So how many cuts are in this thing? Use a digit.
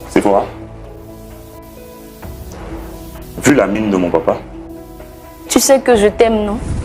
2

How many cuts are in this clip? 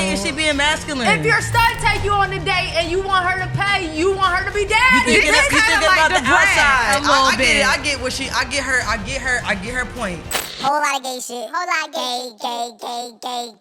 1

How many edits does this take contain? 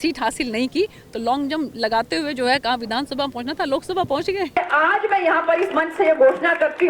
1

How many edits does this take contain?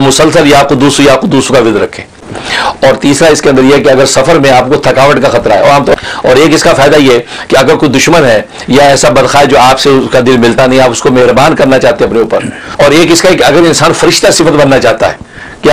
3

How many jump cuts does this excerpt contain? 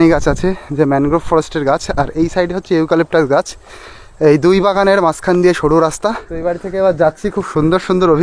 1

